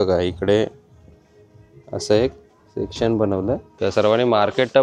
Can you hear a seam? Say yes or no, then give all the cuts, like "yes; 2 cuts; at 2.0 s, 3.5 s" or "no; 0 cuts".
yes; 1 cut; at 3.7 s